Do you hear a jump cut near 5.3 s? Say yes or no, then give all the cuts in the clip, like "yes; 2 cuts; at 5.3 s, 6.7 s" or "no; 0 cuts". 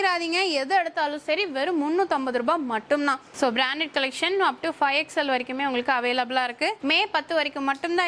no; 2 cuts; at 3.3 s, 6.8 s